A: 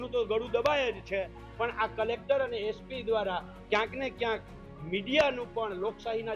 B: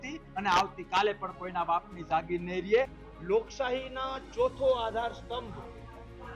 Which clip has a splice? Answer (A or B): B